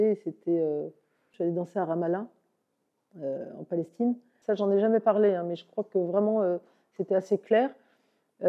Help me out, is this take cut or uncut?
cut